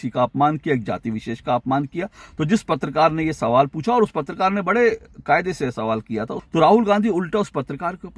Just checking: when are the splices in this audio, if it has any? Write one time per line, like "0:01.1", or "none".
0:06.4